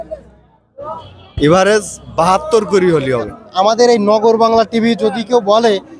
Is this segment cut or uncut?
cut